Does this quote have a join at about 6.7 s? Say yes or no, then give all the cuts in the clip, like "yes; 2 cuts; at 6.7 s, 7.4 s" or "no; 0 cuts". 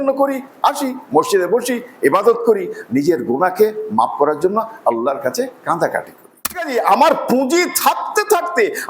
yes; 1 cut; at 6.7 s